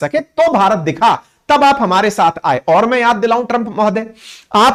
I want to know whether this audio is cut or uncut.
uncut